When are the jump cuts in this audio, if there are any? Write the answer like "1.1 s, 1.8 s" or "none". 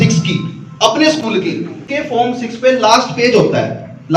1.8 s

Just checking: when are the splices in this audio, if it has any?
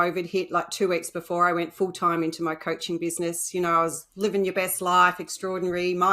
none

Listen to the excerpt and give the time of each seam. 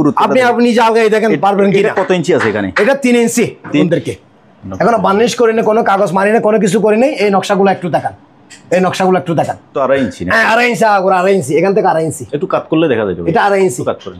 3.8 s, 9.7 s

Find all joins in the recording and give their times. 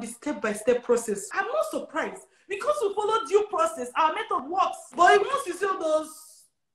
1.2 s, 4.5 s

